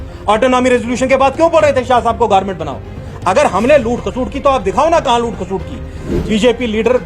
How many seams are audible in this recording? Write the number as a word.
one